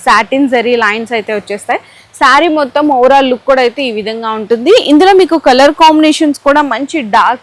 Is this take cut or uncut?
uncut